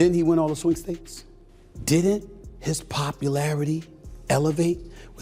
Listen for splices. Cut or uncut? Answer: uncut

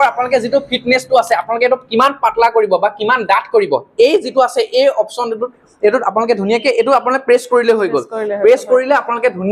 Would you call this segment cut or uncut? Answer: uncut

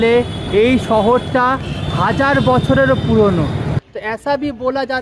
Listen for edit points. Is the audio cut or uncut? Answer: cut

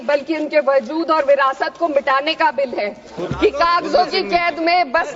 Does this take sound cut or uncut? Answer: cut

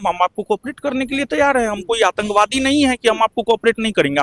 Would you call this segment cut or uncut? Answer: uncut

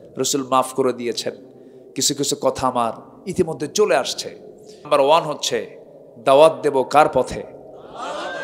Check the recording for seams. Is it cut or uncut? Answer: cut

